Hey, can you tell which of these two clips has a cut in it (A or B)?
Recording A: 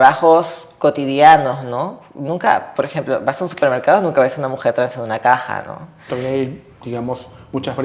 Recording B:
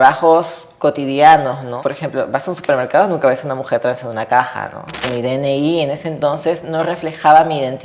B